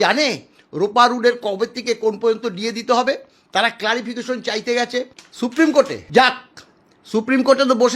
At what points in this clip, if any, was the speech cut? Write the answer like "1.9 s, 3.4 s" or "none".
5.2 s, 6.0 s